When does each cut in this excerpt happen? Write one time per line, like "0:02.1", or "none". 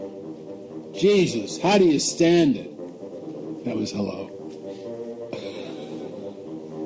0:02.1